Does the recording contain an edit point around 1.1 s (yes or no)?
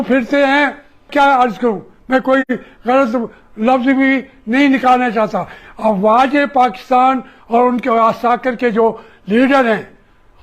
yes